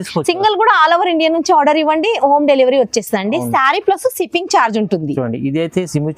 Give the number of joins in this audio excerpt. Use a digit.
0